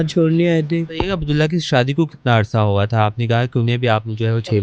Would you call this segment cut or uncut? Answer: cut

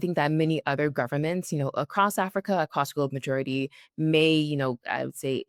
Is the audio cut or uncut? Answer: uncut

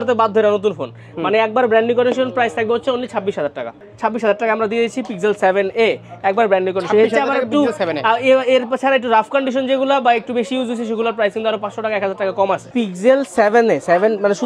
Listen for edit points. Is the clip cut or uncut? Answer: uncut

